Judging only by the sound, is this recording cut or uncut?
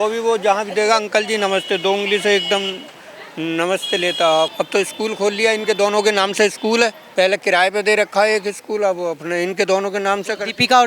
cut